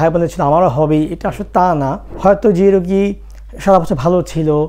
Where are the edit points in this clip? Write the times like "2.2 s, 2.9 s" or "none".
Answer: 2.0 s